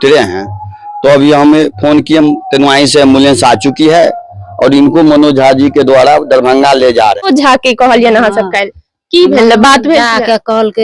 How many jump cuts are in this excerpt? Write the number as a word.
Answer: one